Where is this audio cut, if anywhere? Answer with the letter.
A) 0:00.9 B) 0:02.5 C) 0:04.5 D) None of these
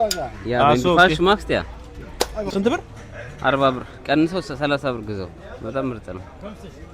B